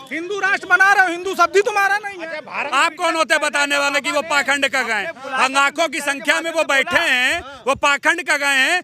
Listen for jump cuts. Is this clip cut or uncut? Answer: cut